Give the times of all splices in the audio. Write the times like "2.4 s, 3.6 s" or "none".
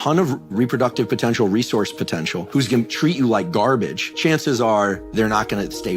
2.5 s, 4.0 s